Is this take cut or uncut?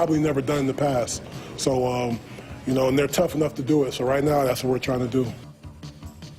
cut